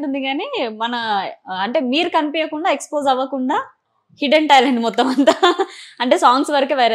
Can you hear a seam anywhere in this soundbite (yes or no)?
no